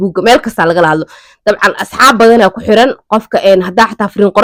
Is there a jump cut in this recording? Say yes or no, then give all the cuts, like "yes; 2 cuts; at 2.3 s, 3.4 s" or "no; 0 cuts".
no; 0 cuts